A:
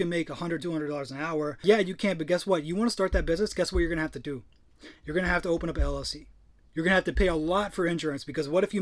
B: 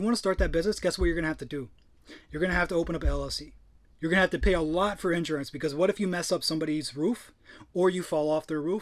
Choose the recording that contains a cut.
A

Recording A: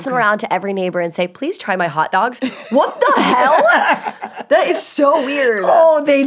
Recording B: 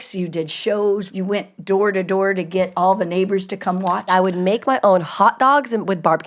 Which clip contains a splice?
B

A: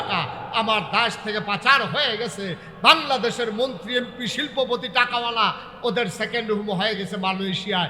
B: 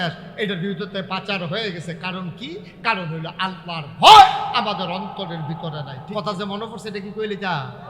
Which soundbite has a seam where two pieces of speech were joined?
B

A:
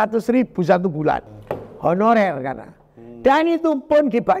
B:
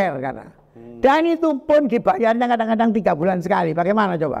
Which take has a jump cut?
A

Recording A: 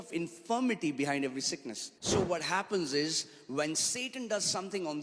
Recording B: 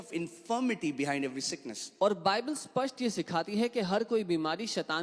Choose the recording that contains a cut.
A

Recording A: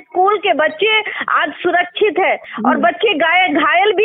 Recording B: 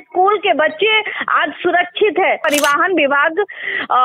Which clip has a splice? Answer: B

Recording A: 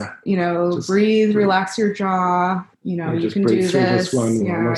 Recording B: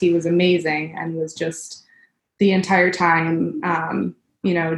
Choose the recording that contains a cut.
A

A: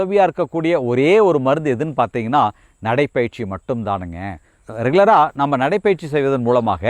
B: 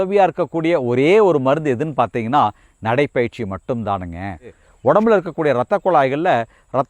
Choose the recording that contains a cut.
B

